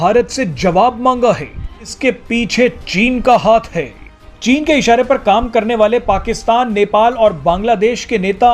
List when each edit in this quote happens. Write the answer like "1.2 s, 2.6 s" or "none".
1.8 s